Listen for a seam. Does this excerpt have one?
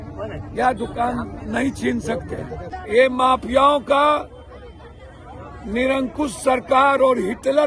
yes; 1 cut; at 3.0 s

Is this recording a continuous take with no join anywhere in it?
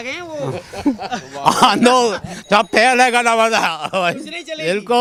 yes; 0 cuts

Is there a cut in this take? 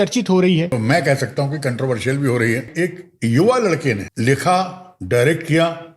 yes; 3 cuts; at 0.7 s, 2.7 s, 4.1 s

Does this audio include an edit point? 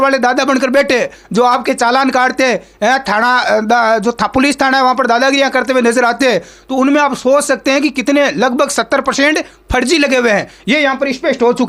no; 0 cuts

